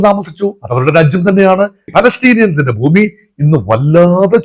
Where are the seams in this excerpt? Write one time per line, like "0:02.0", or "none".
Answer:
0:01.9